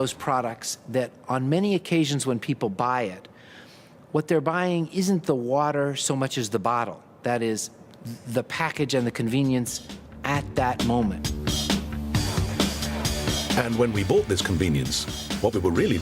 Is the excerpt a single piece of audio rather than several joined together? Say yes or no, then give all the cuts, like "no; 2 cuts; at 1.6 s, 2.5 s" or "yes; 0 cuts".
no; 1 cut; at 4.9 s